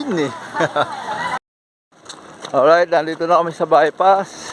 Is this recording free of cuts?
no; 1 cut; at 1.4 s

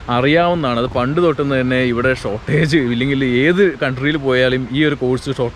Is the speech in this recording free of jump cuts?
yes; 0 cuts

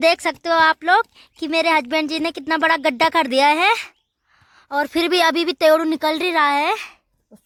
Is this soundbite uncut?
yes; 0 cuts

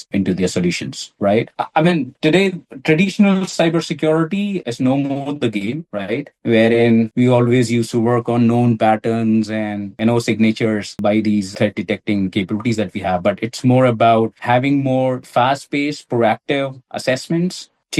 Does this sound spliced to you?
no; 0 cuts

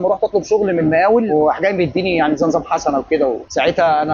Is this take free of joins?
no; 1 cut; at 1.3 s

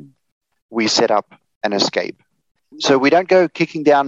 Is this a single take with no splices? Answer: no; 1 cut; at 2.7 s

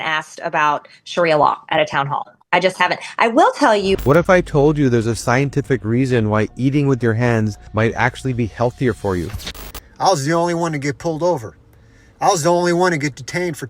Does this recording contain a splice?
yes; 2 cuts; at 4.0 s, 9.4 s

